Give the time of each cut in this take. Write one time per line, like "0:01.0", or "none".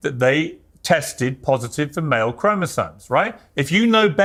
none